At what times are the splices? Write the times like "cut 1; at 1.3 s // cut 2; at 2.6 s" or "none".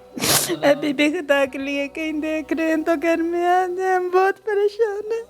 none